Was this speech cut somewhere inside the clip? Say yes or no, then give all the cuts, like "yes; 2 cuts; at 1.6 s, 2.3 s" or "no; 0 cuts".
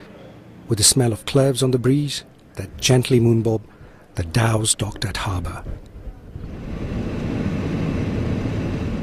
yes; 1 cut; at 6.7 s